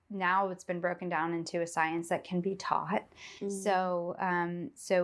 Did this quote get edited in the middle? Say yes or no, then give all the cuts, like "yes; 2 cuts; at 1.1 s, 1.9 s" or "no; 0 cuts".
no; 0 cuts